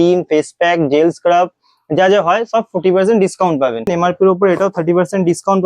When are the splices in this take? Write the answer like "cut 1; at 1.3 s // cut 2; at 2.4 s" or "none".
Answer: cut 1; at 3.9 s